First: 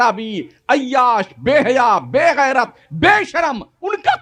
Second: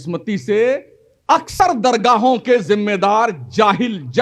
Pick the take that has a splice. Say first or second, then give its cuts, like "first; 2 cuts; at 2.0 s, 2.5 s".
second; 1 cut; at 1.5 s